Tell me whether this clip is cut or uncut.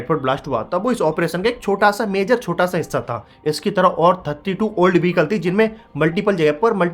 uncut